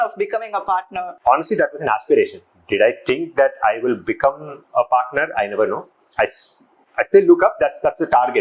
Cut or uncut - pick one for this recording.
cut